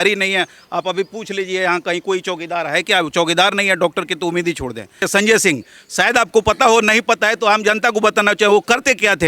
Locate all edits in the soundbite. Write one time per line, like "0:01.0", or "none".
0:05.0